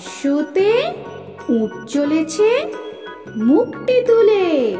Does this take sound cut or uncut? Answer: uncut